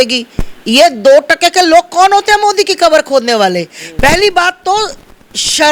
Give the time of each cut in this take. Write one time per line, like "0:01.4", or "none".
none